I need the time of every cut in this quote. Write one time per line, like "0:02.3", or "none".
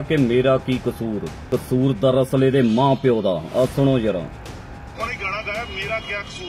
0:01.3